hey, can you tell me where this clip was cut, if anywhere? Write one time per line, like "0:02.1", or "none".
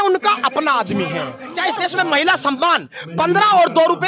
0:01.4